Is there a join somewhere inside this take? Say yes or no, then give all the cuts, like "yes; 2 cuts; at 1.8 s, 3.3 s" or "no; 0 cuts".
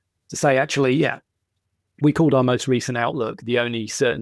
no; 0 cuts